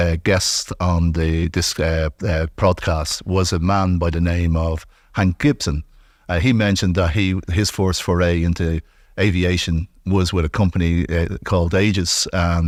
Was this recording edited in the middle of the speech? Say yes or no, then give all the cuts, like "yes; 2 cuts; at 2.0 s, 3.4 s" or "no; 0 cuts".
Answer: no; 0 cuts